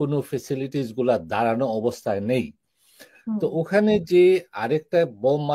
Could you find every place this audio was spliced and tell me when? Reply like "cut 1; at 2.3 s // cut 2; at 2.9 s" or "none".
none